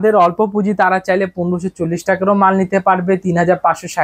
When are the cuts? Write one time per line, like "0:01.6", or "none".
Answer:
none